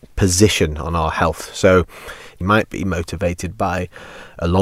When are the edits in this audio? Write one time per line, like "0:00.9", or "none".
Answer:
0:02.4

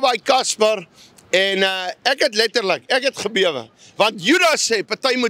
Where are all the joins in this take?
none

